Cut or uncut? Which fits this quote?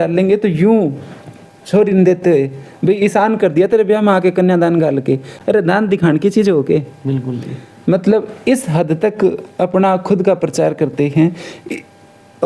uncut